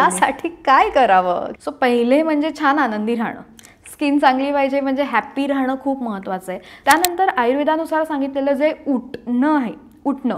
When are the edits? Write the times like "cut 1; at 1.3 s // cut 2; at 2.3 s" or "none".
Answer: cut 1; at 1.5 s // cut 2; at 6.7 s